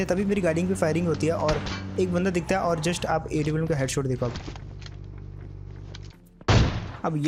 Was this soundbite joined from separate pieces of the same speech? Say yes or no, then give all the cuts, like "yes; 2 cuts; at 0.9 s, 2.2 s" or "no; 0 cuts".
no; 0 cuts